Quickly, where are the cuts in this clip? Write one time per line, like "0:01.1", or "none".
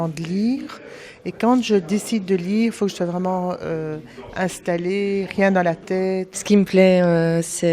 0:06.3